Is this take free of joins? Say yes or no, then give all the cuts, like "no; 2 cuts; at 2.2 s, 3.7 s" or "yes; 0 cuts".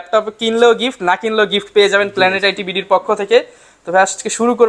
yes; 0 cuts